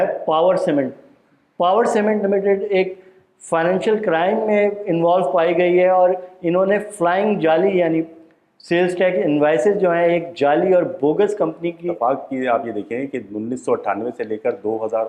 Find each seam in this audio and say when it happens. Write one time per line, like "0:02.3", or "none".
0:11.9